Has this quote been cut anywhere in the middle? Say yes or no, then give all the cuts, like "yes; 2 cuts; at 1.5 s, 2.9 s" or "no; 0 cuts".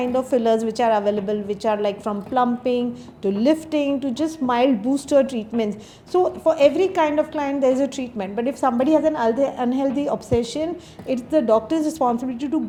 no; 0 cuts